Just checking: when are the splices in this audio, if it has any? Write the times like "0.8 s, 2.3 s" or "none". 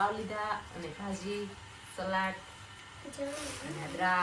none